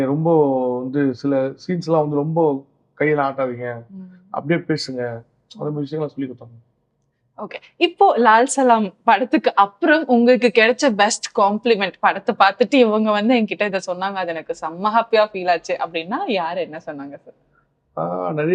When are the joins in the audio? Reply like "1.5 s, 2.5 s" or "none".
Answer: none